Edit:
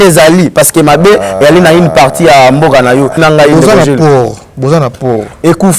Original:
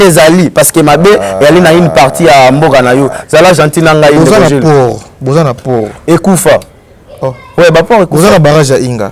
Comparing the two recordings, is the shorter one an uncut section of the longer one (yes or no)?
no